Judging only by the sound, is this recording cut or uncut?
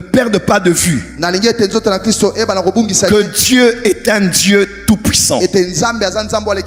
uncut